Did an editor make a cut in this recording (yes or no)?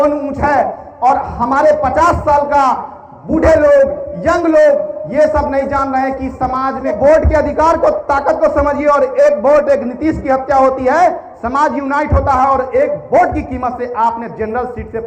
yes